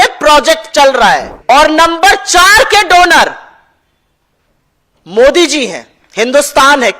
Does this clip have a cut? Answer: yes; 1 cut; at 1.3 s

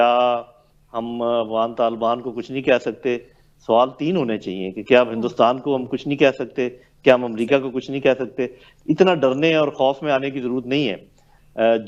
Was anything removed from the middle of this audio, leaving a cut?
no; 0 cuts

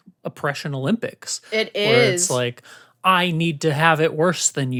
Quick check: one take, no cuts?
yes; 0 cuts

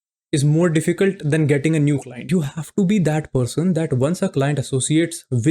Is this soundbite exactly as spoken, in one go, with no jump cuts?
no; 1 cut; at 2.2 s

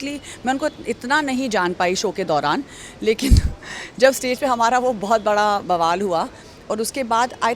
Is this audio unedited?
yes; 0 cuts

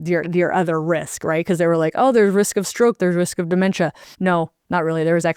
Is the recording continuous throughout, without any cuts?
no; 1 cut; at 4.3 s

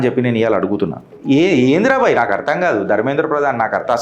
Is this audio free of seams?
no; 1 cut; at 1.1 s

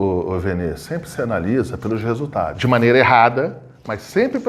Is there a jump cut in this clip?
yes; 1 cut; at 2.5 s

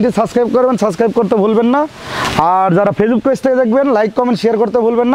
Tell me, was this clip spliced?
no; 0 cuts

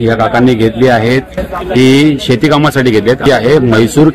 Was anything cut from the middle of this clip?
yes; 1 cut; at 3.2 s

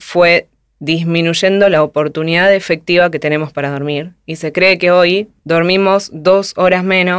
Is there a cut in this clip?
yes; 1 cut; at 5.3 s

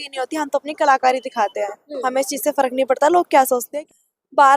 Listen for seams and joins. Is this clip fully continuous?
no; 1 cut; at 3.7 s

